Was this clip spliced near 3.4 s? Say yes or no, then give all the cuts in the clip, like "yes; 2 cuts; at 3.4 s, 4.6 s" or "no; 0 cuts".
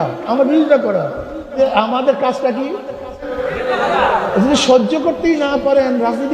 yes; 2 cuts; at 1.5 s, 3.4 s